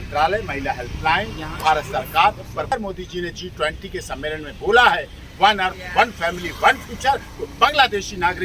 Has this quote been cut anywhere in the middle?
yes; 1 cut; at 2.7 s

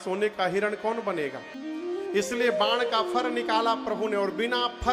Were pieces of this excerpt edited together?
yes; 1 cut; at 1.5 s

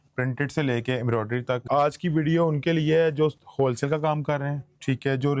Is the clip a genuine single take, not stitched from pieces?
no; 1 cut; at 1.6 s

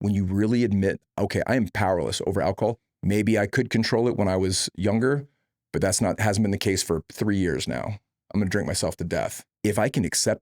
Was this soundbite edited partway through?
yes; 2 cuts; at 2.8 s, 9.4 s

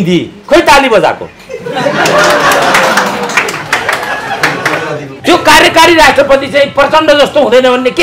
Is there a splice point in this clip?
yes; 1 cut; at 5.1 s

